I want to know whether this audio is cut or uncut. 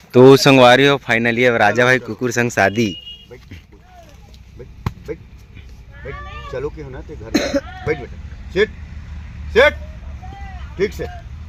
uncut